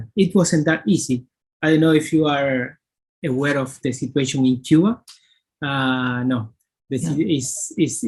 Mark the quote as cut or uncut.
uncut